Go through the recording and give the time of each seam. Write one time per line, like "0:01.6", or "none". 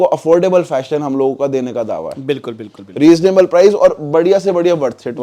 none